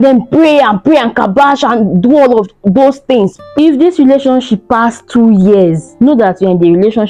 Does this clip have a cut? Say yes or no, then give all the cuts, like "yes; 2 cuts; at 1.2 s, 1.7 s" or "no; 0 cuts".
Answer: yes; 1 cut; at 3.4 s